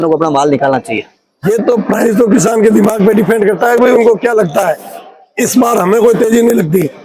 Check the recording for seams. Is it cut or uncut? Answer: uncut